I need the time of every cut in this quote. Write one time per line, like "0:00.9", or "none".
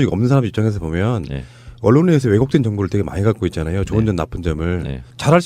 0:03.6